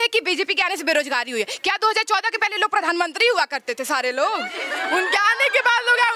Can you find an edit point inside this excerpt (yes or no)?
no